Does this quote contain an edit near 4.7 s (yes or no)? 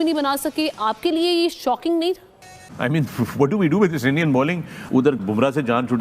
yes